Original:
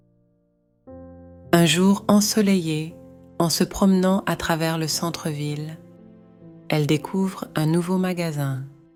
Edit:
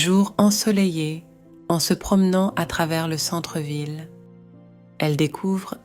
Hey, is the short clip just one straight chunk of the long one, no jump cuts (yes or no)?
yes